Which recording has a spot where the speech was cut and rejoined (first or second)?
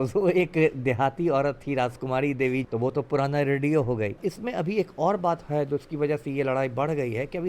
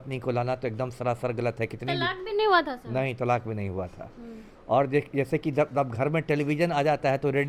first